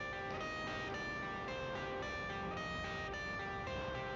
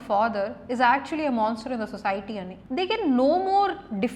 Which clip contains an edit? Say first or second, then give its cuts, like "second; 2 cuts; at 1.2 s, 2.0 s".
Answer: second; 1 cut; at 2.6 s